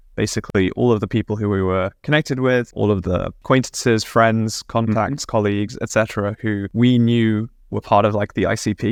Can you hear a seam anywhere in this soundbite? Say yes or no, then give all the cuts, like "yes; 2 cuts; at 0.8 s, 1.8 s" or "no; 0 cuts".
no; 0 cuts